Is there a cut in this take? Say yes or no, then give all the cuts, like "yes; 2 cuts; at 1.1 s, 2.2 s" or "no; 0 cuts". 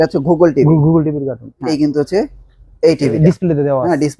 yes; 1 cut; at 1.7 s